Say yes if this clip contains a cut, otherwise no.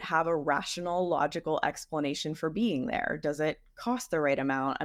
no